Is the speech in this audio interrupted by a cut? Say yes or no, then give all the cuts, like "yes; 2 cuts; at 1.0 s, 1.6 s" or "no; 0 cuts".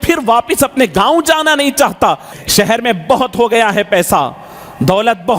yes; 1 cut; at 2.3 s